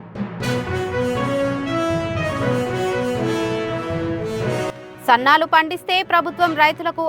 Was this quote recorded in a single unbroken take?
no; 1 cut; at 4.7 s

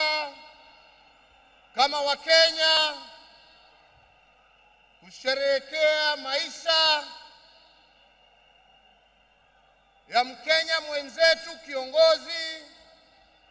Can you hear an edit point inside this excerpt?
no; 0 cuts

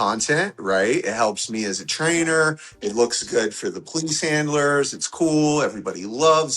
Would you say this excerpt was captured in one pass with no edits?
yes; 0 cuts

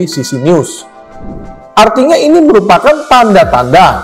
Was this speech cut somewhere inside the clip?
yes; 1 cut; at 1.4 s

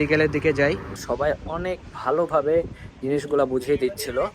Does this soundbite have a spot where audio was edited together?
yes; 1 cut; at 1.0 s

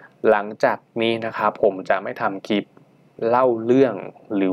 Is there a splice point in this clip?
no; 0 cuts

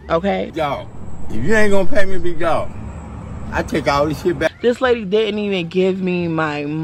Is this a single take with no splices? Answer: yes; 0 cuts

